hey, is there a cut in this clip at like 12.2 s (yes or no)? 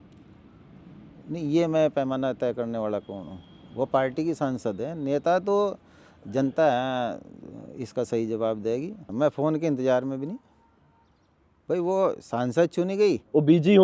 no